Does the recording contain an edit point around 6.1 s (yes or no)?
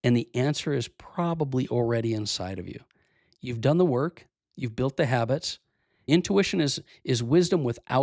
yes